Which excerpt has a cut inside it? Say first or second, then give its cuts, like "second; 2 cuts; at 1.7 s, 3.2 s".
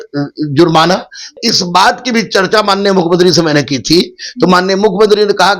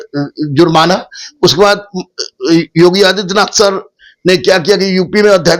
first; 1 cut; at 1.3 s